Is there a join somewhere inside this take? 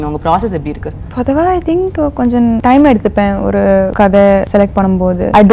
yes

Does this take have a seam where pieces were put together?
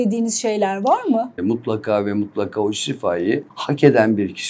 yes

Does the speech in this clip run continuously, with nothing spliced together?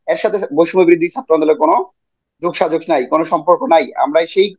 yes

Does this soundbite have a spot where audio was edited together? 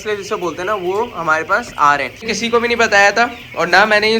yes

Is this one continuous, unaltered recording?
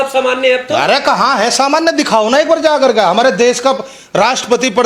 yes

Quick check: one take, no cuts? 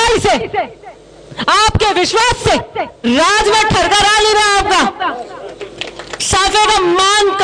no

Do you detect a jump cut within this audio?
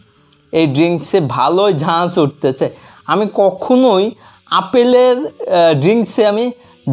no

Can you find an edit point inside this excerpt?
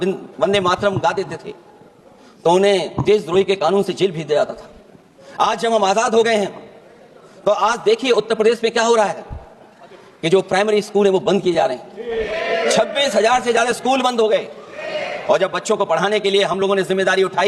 no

